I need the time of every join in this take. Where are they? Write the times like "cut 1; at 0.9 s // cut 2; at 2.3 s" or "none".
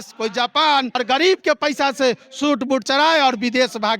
cut 1; at 1.0 s

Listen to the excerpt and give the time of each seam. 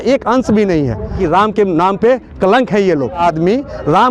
cut 1; at 1.2 s // cut 2; at 3.2 s

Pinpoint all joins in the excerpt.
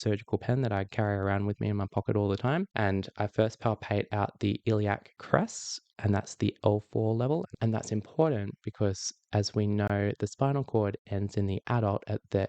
cut 1; at 2.7 s // cut 2; at 7.5 s

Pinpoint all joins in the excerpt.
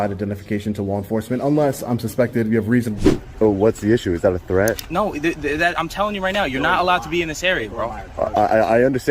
cut 1; at 2.9 s

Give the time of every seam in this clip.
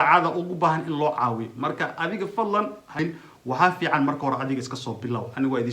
cut 1; at 3.0 s

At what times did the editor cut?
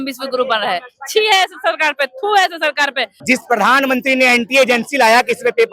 cut 1; at 3.2 s

